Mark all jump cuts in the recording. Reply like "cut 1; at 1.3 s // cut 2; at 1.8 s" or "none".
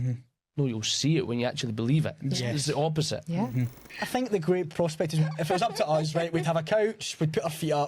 cut 1; at 3.9 s